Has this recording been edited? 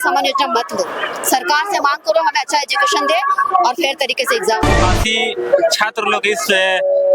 yes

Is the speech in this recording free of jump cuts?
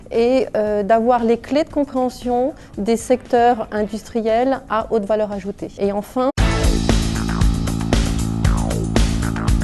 yes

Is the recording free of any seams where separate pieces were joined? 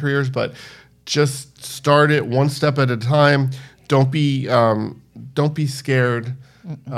yes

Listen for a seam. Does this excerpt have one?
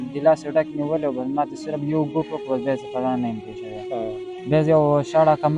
no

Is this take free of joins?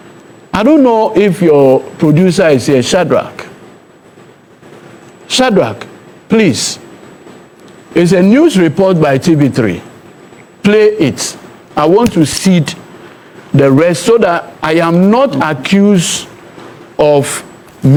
yes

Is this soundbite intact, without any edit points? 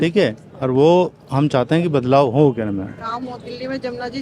yes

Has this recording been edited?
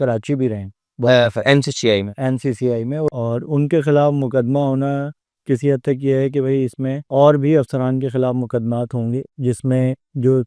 yes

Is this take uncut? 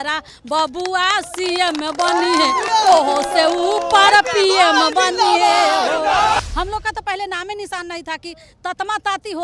no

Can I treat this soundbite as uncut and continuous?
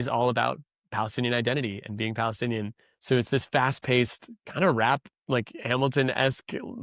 yes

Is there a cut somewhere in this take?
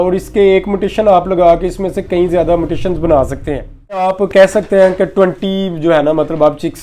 yes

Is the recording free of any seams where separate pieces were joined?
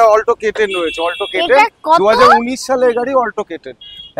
yes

